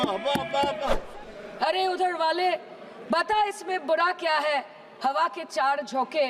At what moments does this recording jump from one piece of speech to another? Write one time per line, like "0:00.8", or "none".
0:01.0

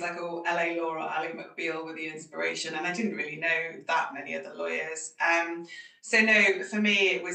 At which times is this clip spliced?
none

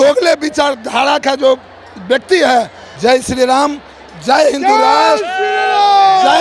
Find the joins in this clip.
0:02.8

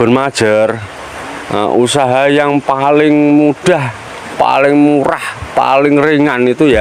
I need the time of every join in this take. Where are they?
none

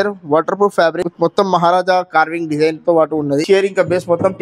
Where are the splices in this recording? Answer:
0:01.1
0:03.4

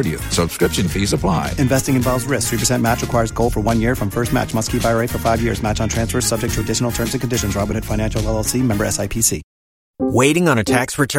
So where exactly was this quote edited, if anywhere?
0:10.0

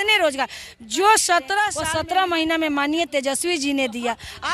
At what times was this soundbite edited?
0:01.8

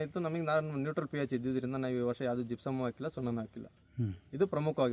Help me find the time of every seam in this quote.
none

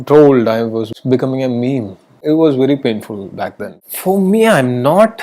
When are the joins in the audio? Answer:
0:00.9
0:02.2
0:03.7

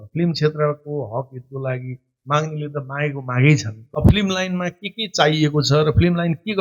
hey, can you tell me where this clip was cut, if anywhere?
0:03.8

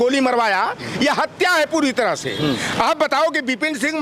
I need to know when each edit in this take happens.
0:02.6

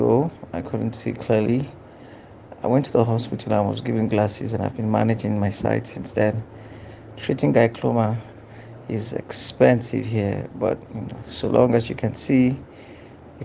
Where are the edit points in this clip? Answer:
none

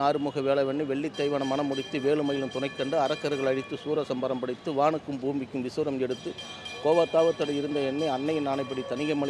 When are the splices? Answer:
none

